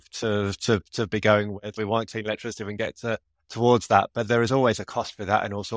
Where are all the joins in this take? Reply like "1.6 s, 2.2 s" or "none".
1.7 s